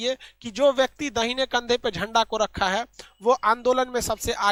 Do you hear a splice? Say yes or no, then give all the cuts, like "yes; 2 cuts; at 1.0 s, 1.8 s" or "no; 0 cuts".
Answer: no; 0 cuts